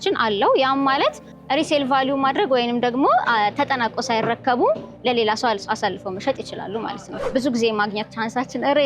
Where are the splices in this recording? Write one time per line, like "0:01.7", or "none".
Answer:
0:01.3
0:07.2